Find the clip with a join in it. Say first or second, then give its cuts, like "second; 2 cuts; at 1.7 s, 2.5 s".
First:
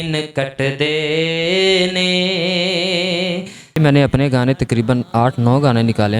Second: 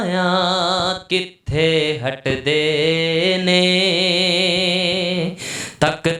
first; 1 cut; at 3.8 s